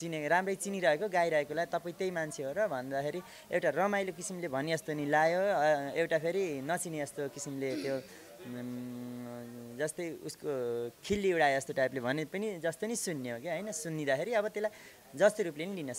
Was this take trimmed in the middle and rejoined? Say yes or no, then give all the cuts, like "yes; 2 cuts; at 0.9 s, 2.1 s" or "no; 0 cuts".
no; 0 cuts